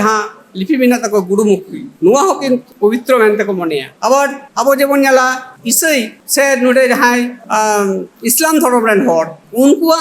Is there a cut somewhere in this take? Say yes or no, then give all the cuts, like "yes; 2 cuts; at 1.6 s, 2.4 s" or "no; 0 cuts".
no; 0 cuts